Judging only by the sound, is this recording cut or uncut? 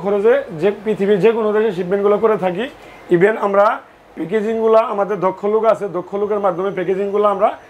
uncut